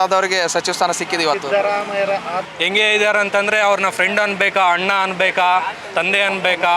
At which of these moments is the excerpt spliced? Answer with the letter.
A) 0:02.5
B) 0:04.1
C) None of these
A